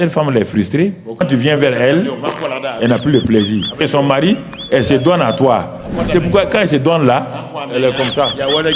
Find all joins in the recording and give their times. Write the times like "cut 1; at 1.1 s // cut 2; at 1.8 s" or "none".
cut 1; at 1.2 s // cut 2; at 3.8 s